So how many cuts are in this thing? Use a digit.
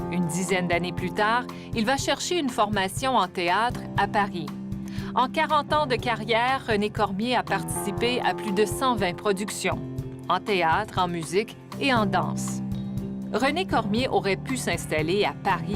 1